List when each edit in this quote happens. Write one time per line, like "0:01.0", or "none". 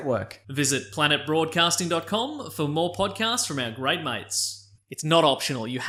none